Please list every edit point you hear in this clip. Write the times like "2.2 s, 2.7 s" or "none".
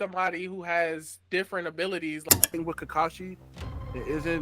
2.5 s